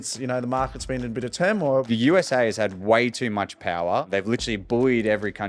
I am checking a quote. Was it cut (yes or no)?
yes